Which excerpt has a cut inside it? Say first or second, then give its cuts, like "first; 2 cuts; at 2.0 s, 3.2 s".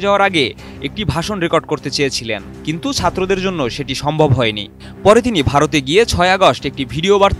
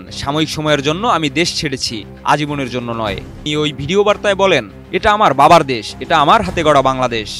second; 1 cut; at 3.4 s